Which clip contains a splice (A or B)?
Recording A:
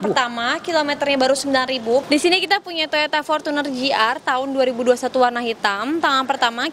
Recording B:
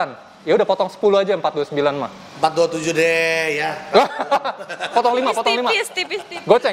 A